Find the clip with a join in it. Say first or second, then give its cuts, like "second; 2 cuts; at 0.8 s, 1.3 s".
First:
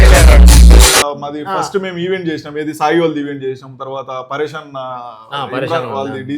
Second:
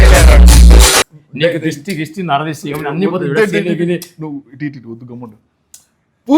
first; 1 cut; at 1.1 s